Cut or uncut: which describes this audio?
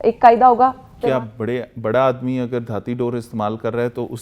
cut